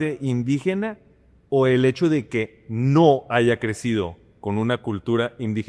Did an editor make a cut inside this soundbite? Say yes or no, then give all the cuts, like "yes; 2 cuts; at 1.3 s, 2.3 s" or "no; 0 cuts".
no; 0 cuts